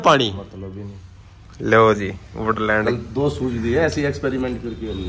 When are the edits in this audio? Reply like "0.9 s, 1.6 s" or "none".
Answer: none